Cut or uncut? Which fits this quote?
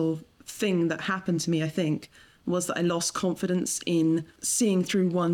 cut